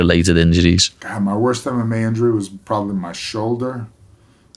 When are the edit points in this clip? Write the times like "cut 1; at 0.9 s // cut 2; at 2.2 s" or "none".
cut 1; at 0.9 s